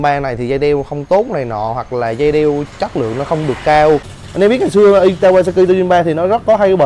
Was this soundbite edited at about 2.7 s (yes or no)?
no